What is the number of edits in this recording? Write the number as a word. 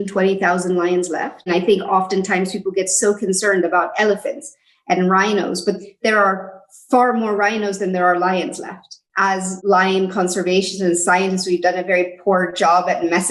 two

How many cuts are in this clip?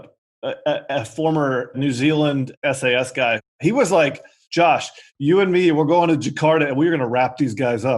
three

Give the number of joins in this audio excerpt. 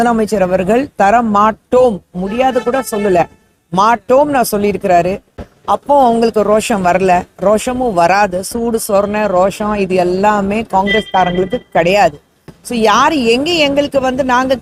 zero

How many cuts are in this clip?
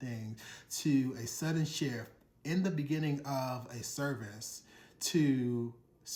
zero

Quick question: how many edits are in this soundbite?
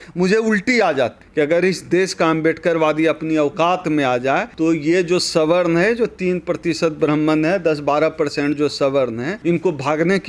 three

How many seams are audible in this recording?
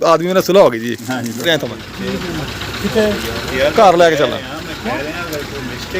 one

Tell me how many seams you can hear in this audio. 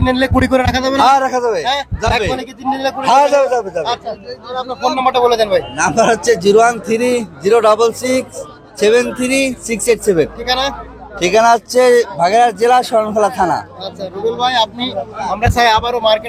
zero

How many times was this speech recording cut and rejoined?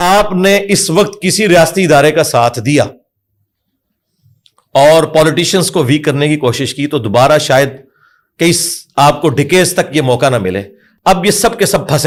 zero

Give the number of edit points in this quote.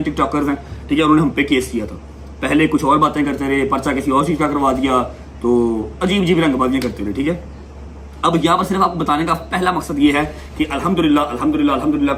zero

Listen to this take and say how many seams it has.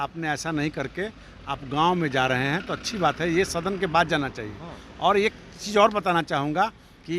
zero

